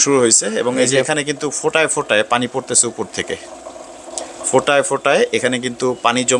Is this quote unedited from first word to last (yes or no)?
yes